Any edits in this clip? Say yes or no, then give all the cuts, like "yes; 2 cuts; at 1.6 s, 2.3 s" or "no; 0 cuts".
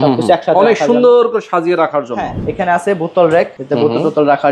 yes; 2 cuts; at 2.4 s, 3.6 s